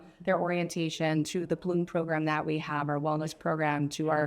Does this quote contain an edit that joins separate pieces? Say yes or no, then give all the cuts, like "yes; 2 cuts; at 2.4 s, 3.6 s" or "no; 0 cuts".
no; 0 cuts